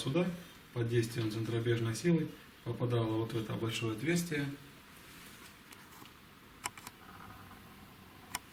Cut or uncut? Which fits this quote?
cut